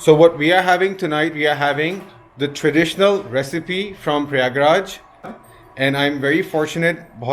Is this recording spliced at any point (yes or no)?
yes